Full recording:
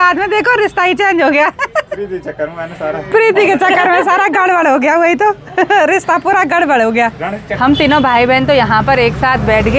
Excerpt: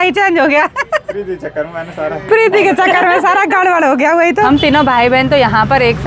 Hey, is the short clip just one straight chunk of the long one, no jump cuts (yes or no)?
no